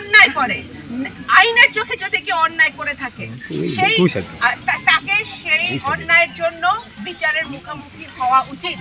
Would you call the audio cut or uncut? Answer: uncut